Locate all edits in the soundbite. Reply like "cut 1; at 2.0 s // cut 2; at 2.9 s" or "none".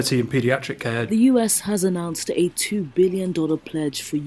cut 1; at 1.0 s